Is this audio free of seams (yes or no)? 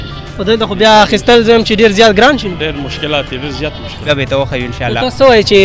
no